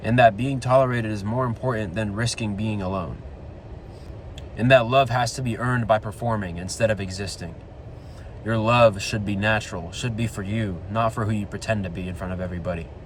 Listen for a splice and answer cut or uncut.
uncut